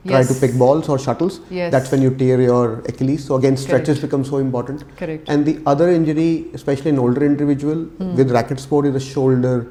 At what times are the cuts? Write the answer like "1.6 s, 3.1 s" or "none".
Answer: none

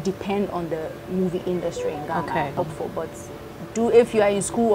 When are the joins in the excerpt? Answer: 2.6 s

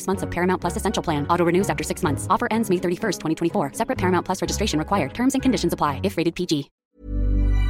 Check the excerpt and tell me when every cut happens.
6.8 s

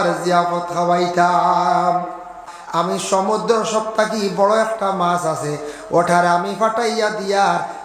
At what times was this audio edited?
2.5 s

